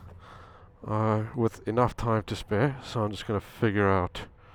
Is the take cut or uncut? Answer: uncut